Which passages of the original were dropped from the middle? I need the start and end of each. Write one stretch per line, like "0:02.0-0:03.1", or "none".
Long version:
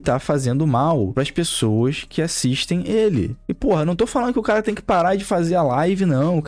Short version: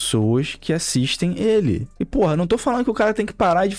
none